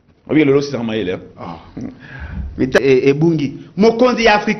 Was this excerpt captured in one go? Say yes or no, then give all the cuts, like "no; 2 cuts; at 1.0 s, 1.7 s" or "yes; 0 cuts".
no; 1 cut; at 2.8 s